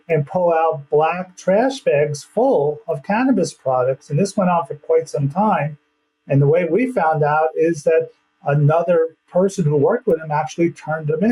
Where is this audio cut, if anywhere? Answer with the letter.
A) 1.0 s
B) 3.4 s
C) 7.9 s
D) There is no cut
D